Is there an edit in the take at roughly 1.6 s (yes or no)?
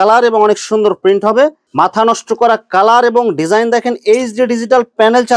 yes